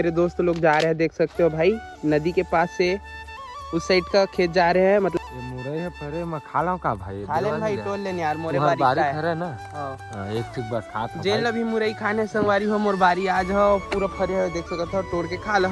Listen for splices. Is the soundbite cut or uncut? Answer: uncut